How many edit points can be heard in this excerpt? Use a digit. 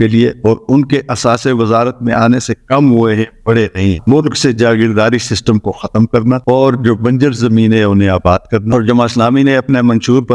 2